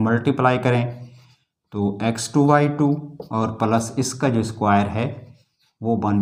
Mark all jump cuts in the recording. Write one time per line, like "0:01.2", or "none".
none